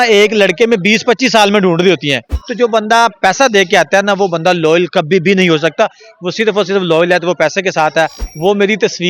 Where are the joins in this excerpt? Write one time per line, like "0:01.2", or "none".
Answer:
0:02.4
0:08.2